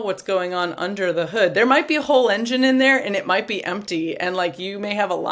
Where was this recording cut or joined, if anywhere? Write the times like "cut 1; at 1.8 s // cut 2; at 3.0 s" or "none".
none